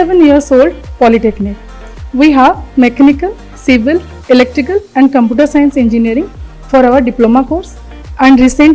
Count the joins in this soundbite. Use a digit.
0